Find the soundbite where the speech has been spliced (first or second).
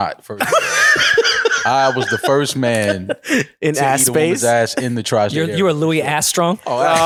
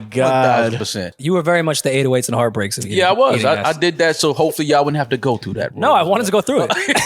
second